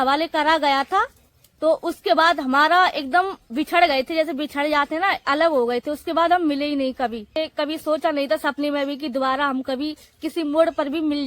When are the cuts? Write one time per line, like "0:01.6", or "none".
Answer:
0:07.4